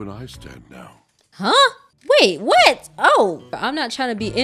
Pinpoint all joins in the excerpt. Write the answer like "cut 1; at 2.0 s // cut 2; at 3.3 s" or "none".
cut 1; at 3.5 s